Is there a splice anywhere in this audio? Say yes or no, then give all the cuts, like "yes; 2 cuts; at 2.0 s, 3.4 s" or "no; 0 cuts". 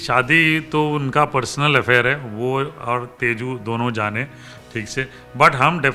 no; 0 cuts